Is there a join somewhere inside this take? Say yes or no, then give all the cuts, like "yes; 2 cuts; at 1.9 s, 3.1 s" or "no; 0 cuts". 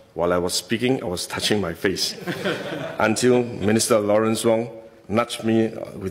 no; 0 cuts